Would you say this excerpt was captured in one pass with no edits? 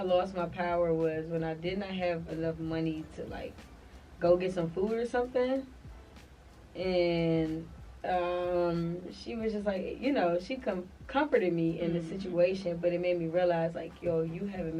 yes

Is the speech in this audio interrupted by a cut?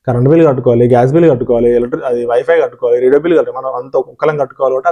no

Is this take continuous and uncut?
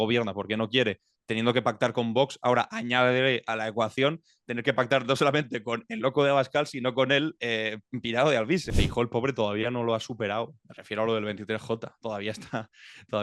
no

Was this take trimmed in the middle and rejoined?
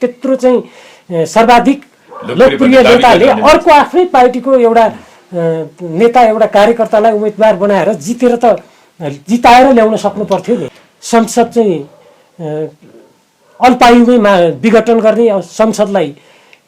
yes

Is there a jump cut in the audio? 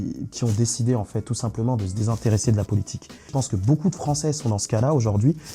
yes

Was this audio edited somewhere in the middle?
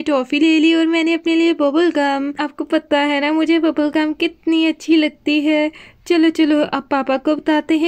no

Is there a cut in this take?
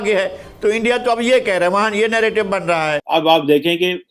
yes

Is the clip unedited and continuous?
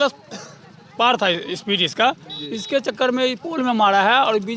yes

